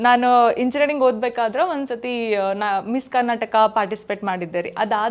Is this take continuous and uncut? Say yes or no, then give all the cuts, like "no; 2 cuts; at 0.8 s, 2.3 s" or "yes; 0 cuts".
yes; 0 cuts